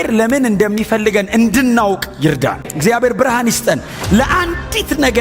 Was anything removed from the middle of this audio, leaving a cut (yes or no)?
yes